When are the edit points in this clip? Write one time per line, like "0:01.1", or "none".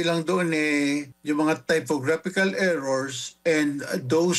0:01.1